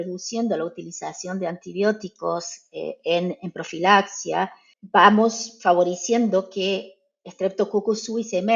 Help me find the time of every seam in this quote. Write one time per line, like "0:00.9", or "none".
none